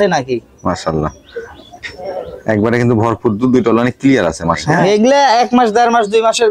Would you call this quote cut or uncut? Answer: cut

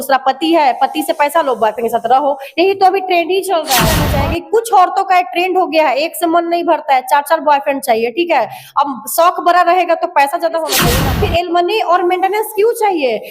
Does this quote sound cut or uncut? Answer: cut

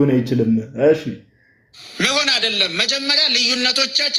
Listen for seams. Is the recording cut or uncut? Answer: uncut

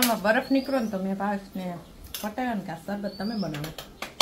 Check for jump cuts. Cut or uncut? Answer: uncut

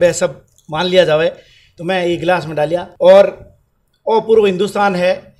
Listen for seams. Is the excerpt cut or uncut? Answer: cut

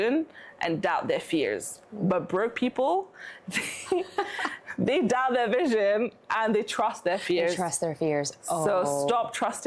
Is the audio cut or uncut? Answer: uncut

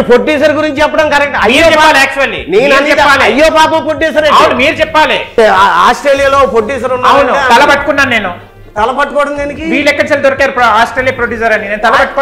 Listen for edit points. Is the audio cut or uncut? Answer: cut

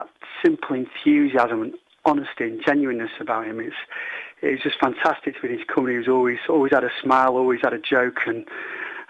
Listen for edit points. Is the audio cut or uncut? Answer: uncut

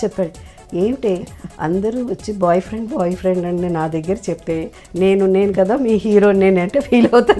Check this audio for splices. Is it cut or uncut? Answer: uncut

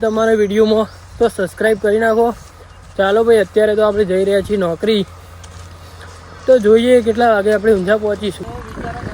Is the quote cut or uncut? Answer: uncut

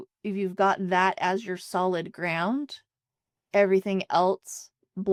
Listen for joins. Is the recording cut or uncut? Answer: uncut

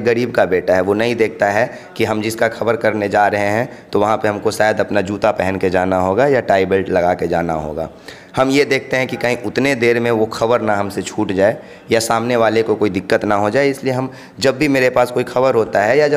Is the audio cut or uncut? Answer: uncut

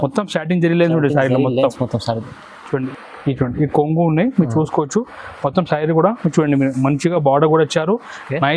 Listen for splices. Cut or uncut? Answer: cut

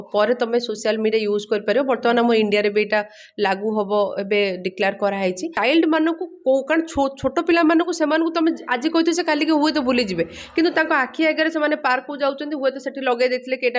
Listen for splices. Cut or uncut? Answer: cut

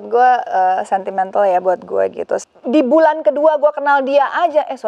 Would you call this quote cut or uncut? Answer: cut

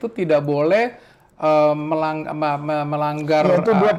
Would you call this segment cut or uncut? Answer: uncut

